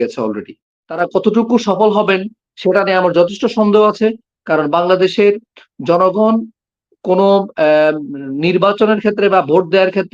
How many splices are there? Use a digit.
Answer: 1